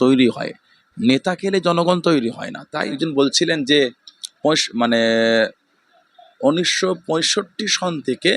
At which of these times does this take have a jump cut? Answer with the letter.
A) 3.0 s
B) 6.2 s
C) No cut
A